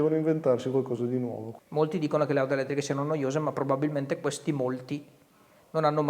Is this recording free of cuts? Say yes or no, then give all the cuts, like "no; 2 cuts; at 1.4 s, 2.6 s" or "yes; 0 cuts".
no; 1 cut; at 1.5 s